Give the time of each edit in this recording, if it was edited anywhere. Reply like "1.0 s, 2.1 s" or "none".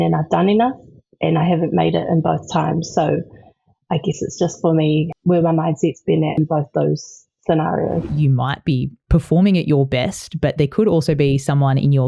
5.1 s, 6.4 s, 8.1 s